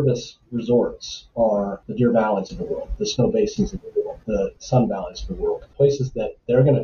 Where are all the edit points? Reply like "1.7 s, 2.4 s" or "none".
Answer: 1.5 s, 5.7 s